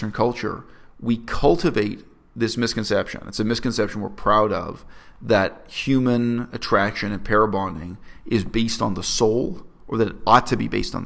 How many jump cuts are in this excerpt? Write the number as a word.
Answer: zero